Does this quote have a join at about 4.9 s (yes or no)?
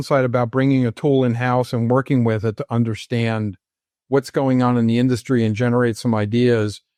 no